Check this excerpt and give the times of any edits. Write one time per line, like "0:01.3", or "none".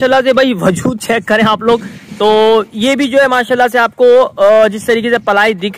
none